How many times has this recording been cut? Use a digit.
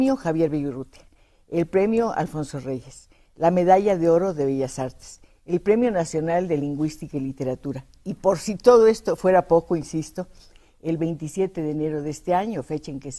0